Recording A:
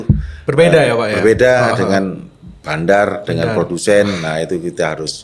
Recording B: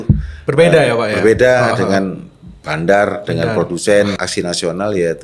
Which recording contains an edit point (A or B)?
B